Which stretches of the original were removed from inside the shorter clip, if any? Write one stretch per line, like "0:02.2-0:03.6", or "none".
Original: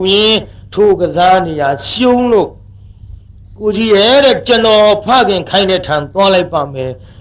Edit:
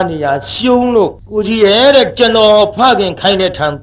0:02.6-0:03.5